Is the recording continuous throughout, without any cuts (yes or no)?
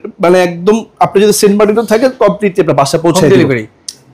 yes